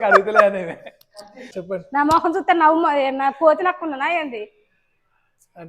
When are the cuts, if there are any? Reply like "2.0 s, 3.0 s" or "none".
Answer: 1.5 s